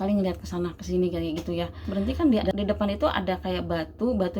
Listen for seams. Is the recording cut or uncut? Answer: cut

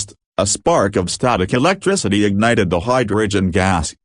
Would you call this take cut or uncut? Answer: uncut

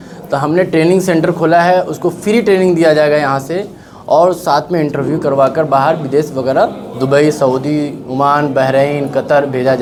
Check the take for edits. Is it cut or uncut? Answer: uncut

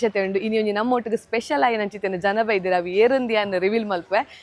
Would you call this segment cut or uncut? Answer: uncut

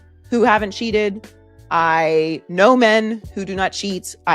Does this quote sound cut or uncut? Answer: uncut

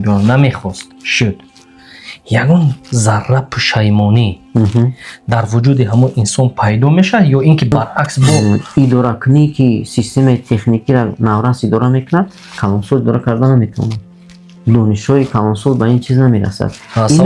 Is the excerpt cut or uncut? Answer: cut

